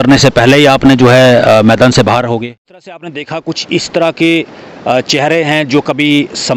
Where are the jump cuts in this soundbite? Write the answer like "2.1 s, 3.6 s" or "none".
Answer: 3.2 s